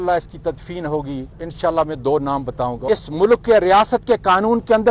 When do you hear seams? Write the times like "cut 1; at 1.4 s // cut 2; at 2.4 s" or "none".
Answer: cut 1; at 1.4 s // cut 2; at 2.8 s